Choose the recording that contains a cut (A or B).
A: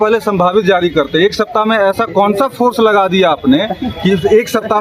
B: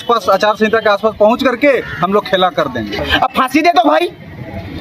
B